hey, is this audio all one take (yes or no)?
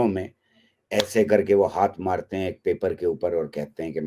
yes